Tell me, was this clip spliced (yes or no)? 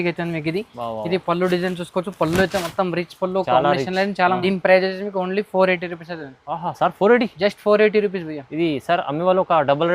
yes